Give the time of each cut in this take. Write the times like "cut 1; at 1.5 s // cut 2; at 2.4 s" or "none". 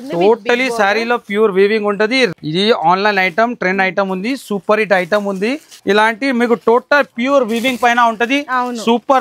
cut 1; at 2.3 s // cut 2; at 5.7 s